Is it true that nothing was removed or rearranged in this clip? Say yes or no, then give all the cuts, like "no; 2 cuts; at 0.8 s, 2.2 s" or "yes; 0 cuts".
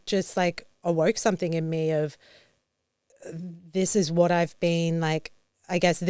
yes; 0 cuts